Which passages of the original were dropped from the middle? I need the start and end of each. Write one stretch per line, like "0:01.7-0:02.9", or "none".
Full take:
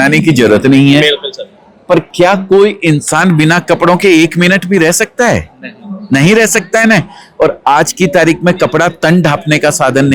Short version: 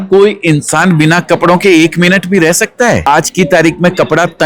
0:05.4-0:07.7